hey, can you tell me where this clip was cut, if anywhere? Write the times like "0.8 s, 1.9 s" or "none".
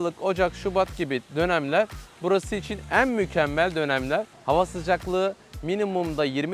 1.3 s, 4.3 s

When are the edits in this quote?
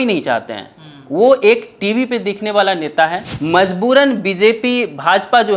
3.3 s

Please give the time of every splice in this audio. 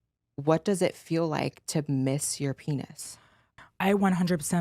3.5 s

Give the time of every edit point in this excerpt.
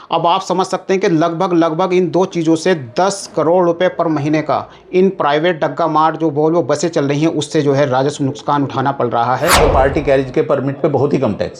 9.6 s

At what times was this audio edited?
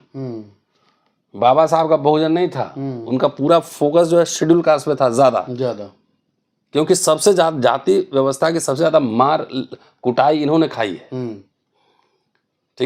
none

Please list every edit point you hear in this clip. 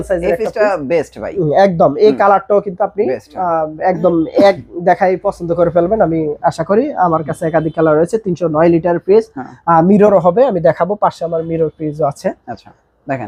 none

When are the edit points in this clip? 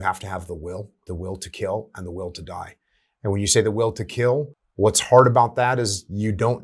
1.0 s, 4.6 s

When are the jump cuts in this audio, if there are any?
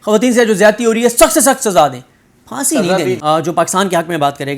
3.2 s

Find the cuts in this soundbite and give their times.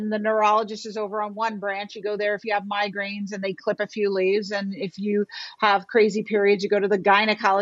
none

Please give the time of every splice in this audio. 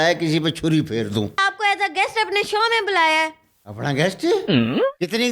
1.4 s

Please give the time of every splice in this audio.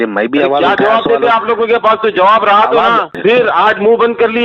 3.1 s

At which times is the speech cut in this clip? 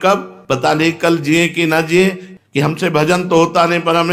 2.3 s

